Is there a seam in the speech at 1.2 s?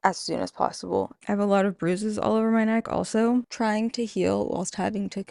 yes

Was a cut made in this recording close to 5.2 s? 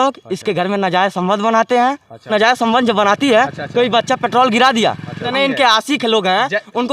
yes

